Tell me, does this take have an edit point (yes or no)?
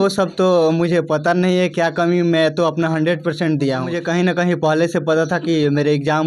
yes